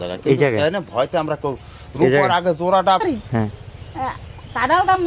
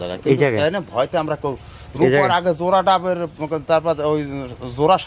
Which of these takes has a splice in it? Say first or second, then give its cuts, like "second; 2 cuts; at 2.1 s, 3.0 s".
first; 1 cut; at 3.0 s